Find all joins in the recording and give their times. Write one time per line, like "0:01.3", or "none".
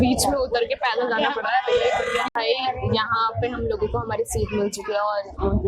0:02.3